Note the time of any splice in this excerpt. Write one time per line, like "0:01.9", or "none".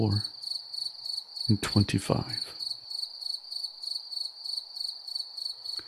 0:02.6